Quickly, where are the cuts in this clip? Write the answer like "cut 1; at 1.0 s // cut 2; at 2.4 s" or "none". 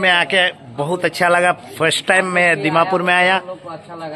none